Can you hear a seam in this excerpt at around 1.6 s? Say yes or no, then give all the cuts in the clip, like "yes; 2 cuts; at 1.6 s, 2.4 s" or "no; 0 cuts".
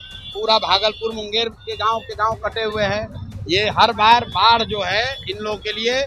no; 0 cuts